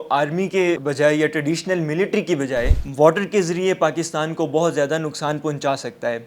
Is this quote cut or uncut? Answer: cut